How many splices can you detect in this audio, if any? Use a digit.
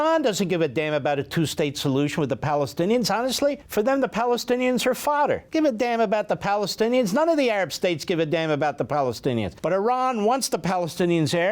3